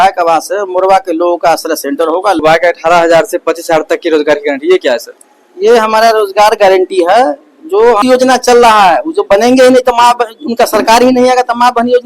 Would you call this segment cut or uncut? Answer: cut